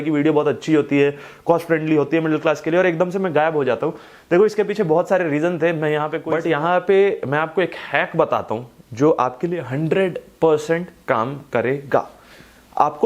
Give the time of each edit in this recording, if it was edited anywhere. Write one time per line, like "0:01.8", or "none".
0:06.2